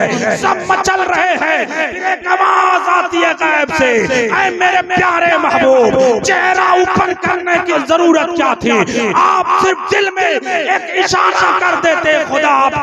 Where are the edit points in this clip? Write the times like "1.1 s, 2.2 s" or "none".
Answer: 7.7 s